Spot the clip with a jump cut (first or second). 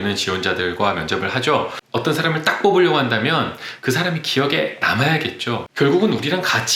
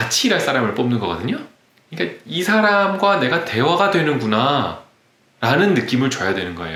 first